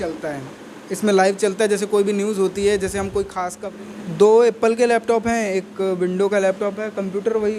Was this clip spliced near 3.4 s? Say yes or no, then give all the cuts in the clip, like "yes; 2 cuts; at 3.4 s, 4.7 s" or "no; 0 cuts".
yes; 1 cut; at 3.4 s